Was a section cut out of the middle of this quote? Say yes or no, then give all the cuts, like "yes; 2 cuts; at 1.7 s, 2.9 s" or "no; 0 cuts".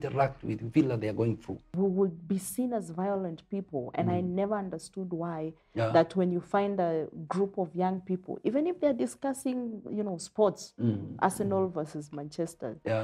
yes; 1 cut; at 1.6 s